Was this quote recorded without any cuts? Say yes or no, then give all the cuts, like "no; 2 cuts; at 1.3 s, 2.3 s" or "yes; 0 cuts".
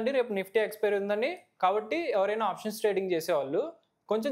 yes; 0 cuts